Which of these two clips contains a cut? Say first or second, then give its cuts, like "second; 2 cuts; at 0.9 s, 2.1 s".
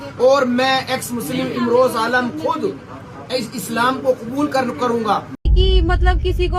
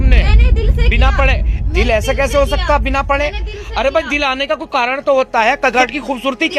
first; 1 cut; at 5.3 s